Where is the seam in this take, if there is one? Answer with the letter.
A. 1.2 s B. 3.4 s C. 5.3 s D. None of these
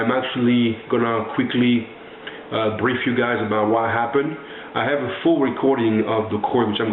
A